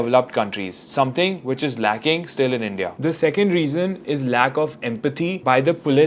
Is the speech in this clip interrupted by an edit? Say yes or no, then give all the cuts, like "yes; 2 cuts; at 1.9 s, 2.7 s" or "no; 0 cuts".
no; 0 cuts